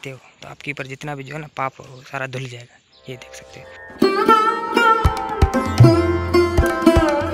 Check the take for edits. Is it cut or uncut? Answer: cut